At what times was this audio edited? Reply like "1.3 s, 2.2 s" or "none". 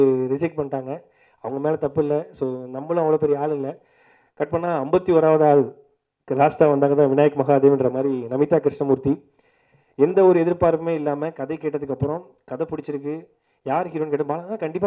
none